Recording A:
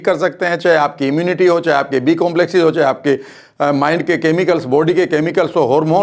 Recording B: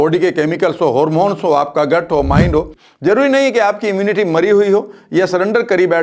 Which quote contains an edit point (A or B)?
B